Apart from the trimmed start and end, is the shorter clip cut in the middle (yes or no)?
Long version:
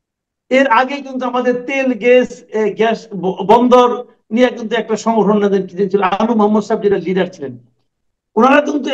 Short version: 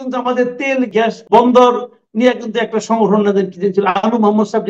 yes